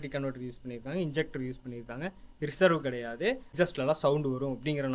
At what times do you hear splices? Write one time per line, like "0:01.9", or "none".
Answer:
0:03.5